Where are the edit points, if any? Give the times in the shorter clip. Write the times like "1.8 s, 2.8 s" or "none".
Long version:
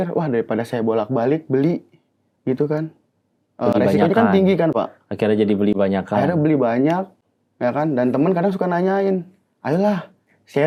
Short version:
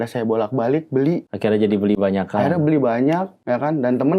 1.3 s, 3.3 s